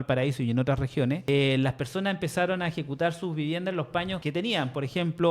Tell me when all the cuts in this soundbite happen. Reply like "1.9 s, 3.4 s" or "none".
1.2 s, 4.2 s